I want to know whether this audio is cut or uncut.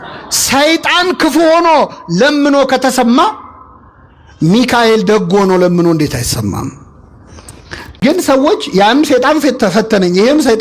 cut